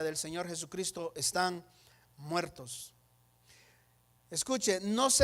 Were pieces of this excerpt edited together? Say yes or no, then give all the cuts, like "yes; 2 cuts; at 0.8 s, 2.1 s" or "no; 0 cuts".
no; 0 cuts